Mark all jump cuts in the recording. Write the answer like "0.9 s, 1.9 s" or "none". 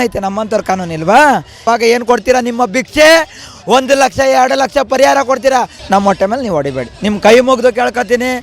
1.6 s, 5.8 s